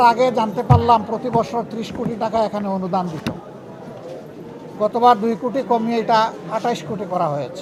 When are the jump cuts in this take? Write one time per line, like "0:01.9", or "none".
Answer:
none